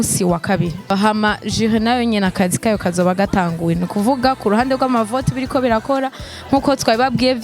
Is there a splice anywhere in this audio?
yes; 1 cut; at 0.9 s

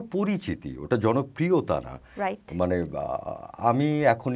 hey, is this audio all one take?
yes; 0 cuts

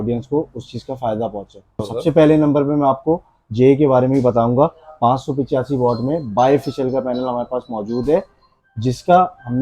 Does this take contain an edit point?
yes; 1 cut; at 1.8 s

